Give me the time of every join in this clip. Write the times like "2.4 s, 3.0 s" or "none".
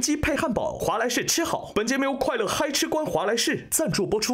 none